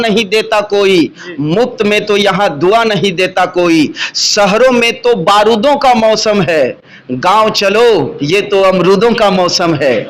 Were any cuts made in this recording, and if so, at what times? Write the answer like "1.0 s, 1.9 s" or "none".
none